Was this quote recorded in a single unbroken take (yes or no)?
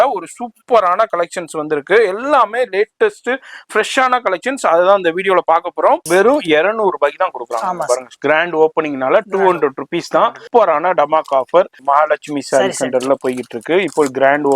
no